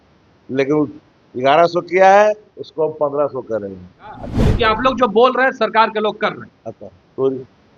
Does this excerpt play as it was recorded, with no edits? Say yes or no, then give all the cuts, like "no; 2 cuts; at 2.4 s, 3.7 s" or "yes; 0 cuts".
no; 1 cut; at 4.4 s